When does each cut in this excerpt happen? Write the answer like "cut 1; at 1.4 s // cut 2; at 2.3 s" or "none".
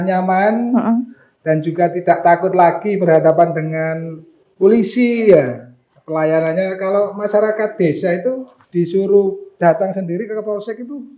cut 1; at 8.5 s // cut 2; at 9.5 s

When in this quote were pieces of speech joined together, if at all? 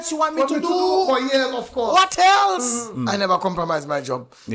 cut 1; at 2.9 s

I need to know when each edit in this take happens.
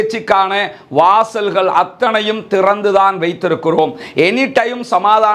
none

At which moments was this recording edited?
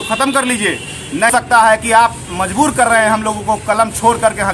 cut 1; at 1.3 s

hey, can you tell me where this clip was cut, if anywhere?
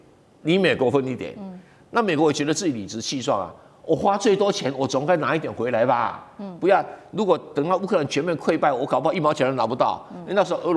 none

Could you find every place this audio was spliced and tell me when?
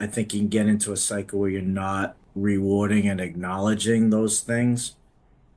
cut 1; at 2.2 s

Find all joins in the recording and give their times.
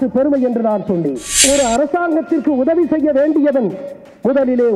cut 1; at 1.4 s

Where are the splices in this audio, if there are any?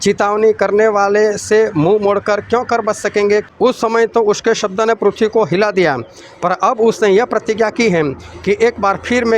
cut 1; at 3.5 s

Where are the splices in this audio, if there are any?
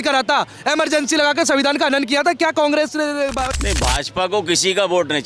cut 1; at 3.5 s

